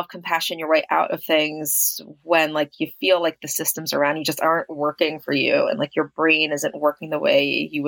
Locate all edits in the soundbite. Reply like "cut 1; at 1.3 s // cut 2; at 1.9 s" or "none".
none